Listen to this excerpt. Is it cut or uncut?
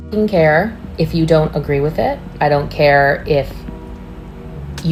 uncut